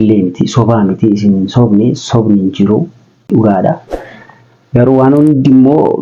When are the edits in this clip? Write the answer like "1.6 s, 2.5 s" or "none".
3.3 s